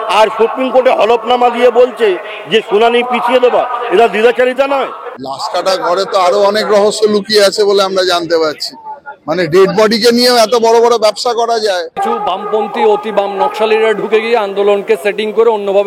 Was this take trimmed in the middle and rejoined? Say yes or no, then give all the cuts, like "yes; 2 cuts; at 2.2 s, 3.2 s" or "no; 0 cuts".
yes; 2 cuts; at 5.0 s, 12.0 s